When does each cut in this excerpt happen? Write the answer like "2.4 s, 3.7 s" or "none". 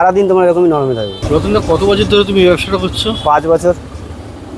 1.2 s